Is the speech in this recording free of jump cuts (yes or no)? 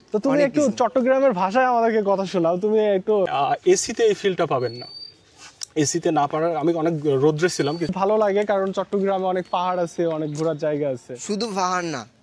no